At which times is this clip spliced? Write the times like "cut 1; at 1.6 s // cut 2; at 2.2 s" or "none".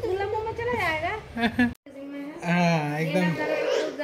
cut 1; at 1.8 s

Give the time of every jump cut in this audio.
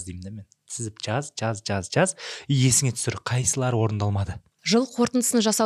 cut 1; at 4.5 s

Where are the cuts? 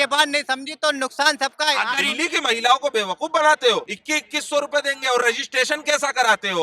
cut 1; at 1.9 s // cut 2; at 4.0 s

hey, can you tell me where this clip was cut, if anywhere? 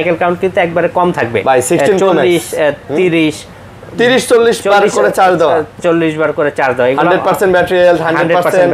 none

